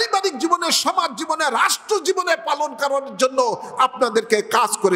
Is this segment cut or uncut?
uncut